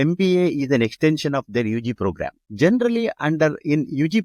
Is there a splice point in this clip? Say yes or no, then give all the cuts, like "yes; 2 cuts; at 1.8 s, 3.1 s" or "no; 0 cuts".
no; 0 cuts